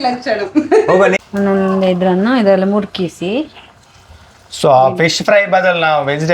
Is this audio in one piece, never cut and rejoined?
no; 1 cut; at 1.2 s

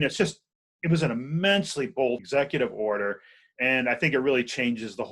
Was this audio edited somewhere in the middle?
yes; 1 cut; at 2.2 s

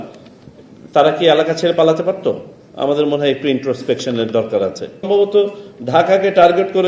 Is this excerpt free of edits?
no; 1 cut; at 5.1 s

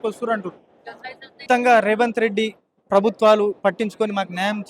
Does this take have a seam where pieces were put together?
yes; 1 cut; at 1.4 s

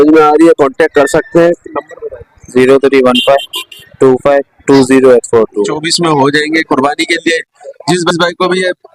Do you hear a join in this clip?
yes; 1 cut; at 5.9 s

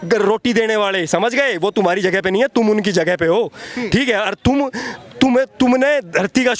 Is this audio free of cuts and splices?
yes; 0 cuts

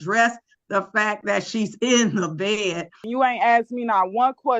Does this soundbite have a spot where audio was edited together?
yes; 1 cut; at 3.0 s

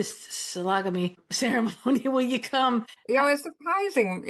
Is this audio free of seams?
no; 2 cuts; at 1.2 s, 2.9 s

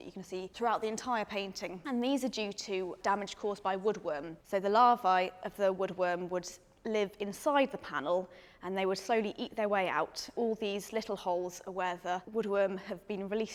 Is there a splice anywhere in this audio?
no; 0 cuts

